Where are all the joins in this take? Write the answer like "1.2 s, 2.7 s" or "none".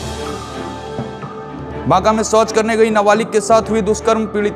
none